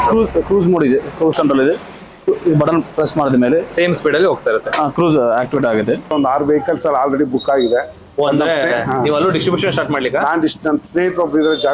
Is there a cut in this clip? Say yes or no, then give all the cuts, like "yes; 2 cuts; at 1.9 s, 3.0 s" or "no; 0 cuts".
yes; 1 cut; at 6.1 s